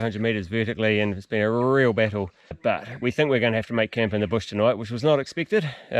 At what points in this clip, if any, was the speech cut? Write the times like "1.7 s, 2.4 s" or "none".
2.6 s